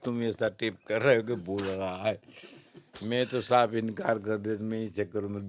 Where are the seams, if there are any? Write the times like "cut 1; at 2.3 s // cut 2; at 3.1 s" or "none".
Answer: none